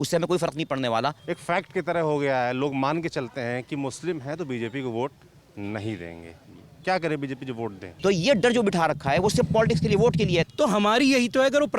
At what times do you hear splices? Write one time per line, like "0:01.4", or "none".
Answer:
0:01.3
0:07.8
0:10.5